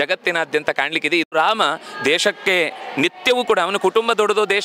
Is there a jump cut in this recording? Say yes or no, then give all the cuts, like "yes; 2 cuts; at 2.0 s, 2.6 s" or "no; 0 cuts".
yes; 1 cut; at 1.3 s